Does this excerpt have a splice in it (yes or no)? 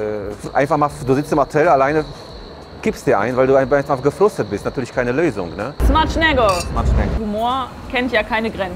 yes